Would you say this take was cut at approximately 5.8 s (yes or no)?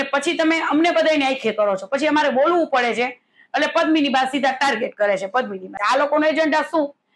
yes